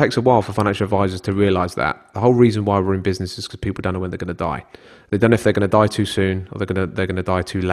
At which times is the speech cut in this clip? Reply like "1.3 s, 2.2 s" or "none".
none